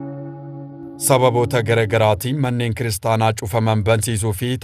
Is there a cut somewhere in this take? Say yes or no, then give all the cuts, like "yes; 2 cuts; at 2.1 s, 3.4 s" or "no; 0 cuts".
yes; 1 cut; at 1.1 s